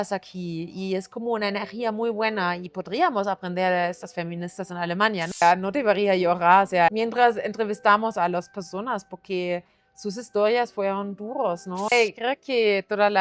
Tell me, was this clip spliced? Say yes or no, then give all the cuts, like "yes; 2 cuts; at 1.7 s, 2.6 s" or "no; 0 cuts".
yes; 3 cuts; at 5.4 s, 6.9 s, 11.9 s